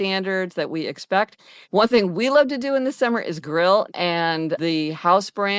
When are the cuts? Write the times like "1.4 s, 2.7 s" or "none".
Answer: 1.5 s, 3.9 s